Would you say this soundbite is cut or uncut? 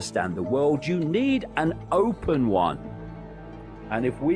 cut